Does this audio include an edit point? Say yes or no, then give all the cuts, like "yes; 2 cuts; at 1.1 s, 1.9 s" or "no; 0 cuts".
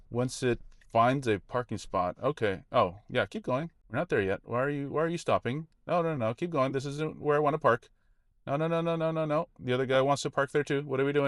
yes; 1 cut; at 3.8 s